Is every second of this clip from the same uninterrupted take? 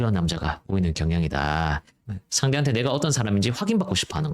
no; 1 cut; at 1.9 s

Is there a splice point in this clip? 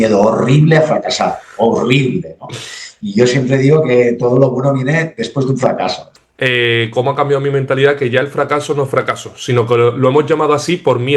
yes; 1 cut; at 6.1 s

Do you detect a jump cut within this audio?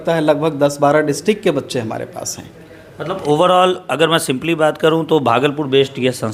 no; 0 cuts

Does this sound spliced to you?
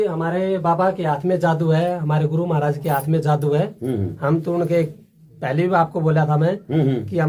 no; 0 cuts

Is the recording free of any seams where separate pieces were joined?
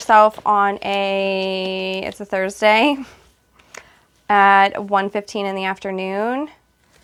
yes; 0 cuts

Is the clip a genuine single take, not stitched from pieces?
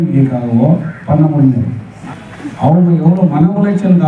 no; 1 cut; at 1.9 s

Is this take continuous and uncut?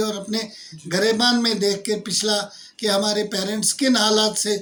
yes; 0 cuts

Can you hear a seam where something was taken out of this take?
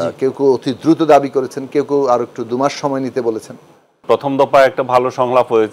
yes; 1 cut; at 4.0 s

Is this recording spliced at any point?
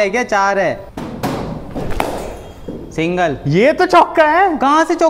yes; 1 cut; at 0.9 s

